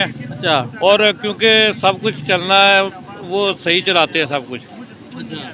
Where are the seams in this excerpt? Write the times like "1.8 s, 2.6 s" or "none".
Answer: none